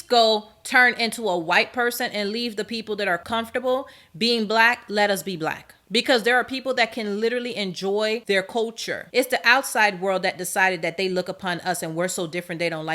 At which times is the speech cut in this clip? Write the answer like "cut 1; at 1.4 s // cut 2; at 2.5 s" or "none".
cut 1; at 5.7 s // cut 2; at 9.0 s